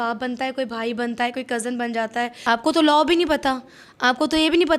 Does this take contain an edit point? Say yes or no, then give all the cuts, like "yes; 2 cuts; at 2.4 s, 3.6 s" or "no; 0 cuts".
yes; 1 cut; at 2.3 s